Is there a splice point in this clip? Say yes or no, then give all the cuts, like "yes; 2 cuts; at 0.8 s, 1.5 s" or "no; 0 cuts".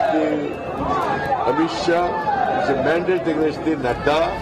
yes; 1 cut; at 1.8 s